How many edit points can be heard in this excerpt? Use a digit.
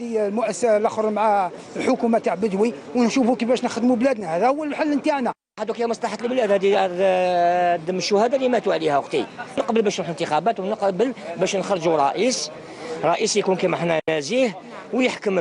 2